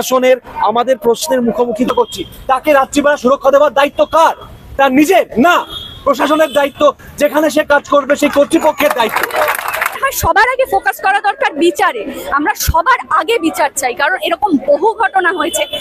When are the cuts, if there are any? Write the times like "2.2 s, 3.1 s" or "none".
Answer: 1.9 s, 10.0 s